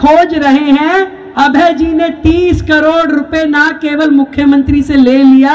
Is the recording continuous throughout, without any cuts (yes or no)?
no